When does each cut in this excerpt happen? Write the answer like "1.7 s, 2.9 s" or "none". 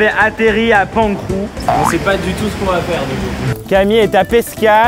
none